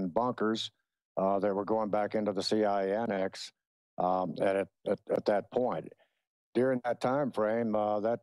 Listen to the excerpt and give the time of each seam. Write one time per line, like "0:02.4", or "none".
0:04.5